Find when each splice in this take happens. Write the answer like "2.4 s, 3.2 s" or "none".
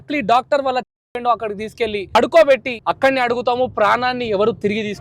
2.1 s, 2.7 s